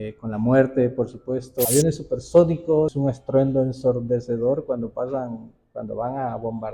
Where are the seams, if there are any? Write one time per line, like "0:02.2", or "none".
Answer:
0:01.7
0:02.9